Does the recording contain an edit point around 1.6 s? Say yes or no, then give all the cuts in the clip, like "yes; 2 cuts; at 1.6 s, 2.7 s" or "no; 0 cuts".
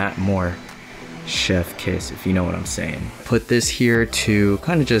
no; 1 cut; at 3.1 s